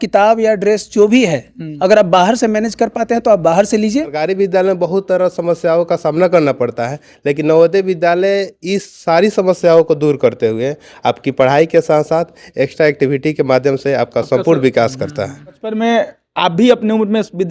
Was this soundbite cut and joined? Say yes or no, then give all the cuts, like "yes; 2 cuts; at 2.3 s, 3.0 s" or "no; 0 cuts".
yes; 2 cuts; at 4.2 s, 15.7 s